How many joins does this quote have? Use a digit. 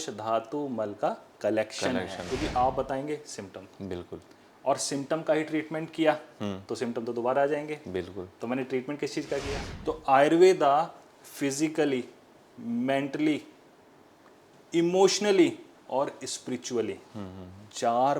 2